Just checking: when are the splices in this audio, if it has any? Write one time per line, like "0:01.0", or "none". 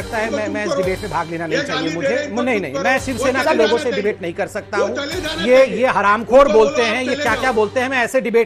none